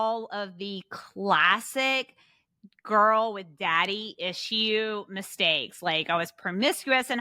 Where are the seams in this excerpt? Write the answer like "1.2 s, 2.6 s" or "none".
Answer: none